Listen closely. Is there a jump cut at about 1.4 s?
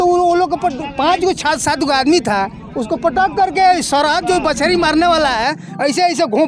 no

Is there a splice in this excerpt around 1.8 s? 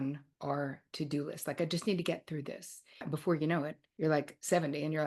no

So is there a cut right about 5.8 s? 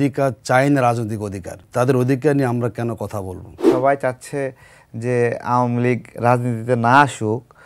no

